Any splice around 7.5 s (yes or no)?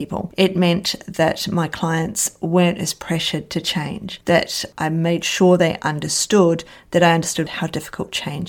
yes